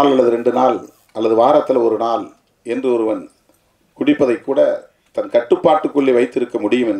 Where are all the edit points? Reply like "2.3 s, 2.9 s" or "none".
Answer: none